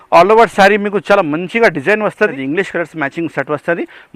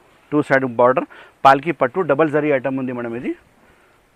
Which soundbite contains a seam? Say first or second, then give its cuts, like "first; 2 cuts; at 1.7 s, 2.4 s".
first; 1 cut; at 2.4 s